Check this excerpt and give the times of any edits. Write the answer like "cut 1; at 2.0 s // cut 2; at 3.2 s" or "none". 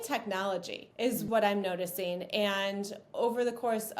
cut 1; at 1.2 s